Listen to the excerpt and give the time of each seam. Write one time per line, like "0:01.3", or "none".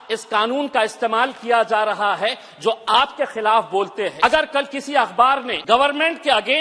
0:04.1
0:05.5